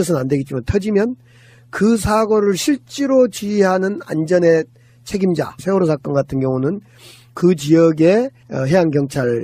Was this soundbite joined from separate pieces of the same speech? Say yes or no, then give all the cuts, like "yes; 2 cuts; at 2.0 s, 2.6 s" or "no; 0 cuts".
yes; 1 cut; at 5.5 s